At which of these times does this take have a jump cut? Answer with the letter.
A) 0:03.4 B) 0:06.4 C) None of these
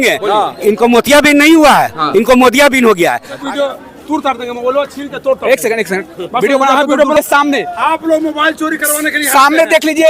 A